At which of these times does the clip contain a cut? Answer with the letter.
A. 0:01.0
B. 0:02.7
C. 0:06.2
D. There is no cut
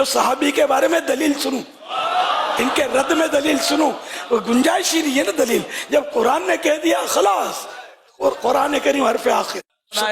D